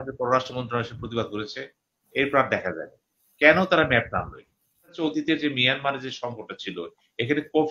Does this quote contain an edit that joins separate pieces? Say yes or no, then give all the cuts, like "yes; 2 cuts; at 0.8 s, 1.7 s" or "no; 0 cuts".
yes; 1 cut; at 5.0 s